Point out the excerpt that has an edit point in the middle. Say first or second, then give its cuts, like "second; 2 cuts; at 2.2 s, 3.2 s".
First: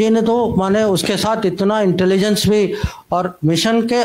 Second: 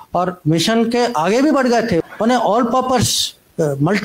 second; 1 cut; at 2.0 s